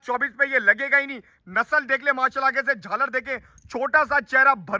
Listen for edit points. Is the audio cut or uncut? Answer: uncut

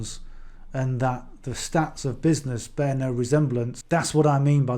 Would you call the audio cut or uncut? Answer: cut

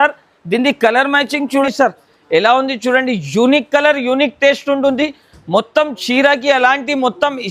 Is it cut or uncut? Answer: cut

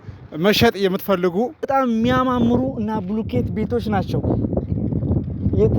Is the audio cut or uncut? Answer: cut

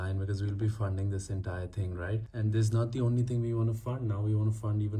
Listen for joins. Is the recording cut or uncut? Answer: uncut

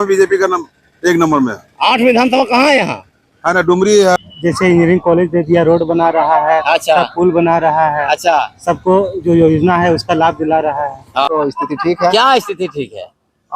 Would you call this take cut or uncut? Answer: cut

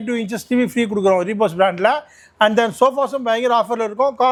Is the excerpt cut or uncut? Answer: uncut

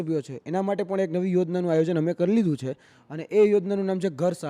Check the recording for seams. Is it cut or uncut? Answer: uncut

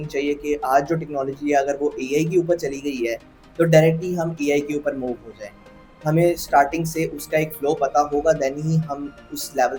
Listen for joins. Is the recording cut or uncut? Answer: uncut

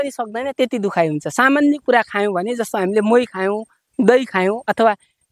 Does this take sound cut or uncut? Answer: uncut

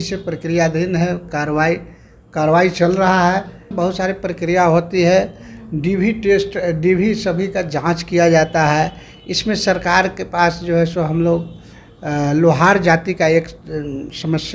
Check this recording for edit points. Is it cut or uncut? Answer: cut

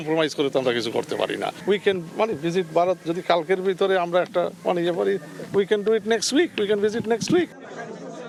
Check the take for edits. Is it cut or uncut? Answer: uncut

